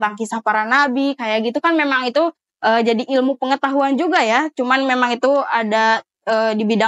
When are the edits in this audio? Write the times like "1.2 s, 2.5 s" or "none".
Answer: none